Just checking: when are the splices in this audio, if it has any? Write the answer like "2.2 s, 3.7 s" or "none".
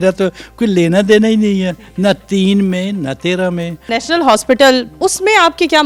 4.0 s, 4.9 s